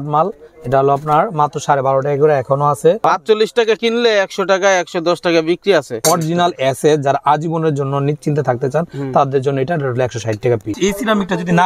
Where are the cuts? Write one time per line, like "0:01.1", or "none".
0:03.0
0:06.0
0:10.7

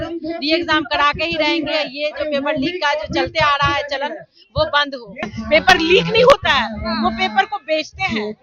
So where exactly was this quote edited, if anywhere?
0:05.3

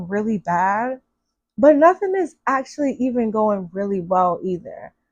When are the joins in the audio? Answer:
none

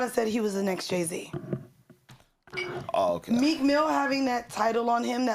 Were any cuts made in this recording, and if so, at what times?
0:01.6

